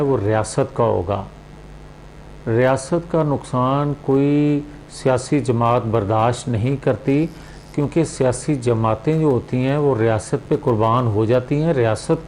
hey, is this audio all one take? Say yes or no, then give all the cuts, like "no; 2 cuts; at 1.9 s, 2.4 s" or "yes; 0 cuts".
yes; 0 cuts